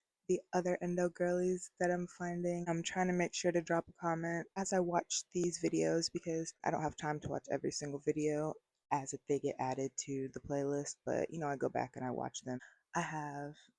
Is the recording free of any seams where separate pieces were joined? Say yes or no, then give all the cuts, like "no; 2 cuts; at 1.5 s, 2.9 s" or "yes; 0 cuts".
no; 5 cuts; at 2.7 s, 4.5 s, 6.5 s, 8.7 s, 12.6 s